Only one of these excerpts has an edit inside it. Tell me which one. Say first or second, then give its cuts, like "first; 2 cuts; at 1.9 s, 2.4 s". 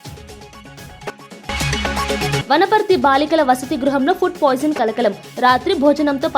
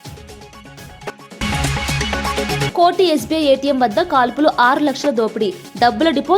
second; 1 cut; at 1.4 s